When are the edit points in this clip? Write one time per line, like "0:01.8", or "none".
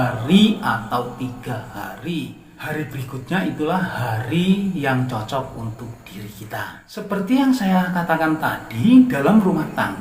0:06.8